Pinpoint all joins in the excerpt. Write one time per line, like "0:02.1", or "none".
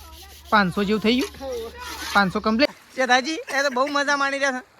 0:02.7